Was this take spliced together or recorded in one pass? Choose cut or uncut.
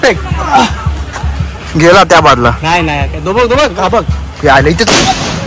uncut